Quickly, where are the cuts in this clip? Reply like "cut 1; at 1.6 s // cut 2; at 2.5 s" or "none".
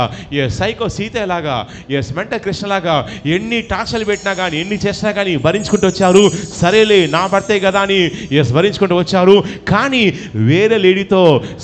none